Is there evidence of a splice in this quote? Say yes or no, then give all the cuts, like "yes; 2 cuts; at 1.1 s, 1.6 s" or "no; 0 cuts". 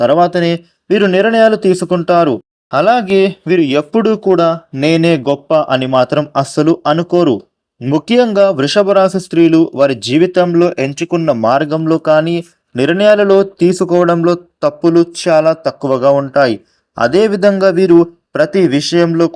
yes; 1 cut; at 2.5 s